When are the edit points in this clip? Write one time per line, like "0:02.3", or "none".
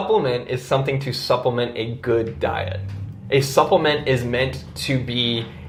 none